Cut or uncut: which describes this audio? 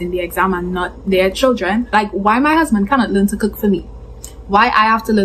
cut